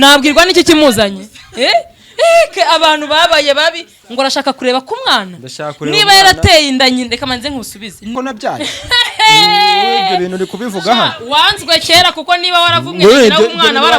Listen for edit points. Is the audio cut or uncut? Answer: cut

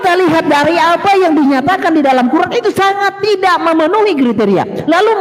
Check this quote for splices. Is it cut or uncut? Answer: uncut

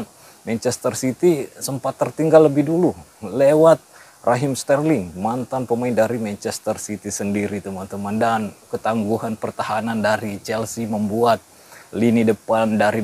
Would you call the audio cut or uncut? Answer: cut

